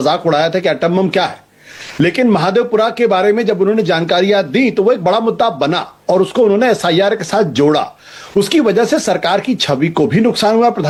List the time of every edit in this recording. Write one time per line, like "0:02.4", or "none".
none